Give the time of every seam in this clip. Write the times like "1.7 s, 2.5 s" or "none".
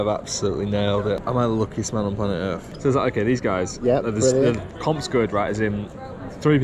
1.2 s, 2.7 s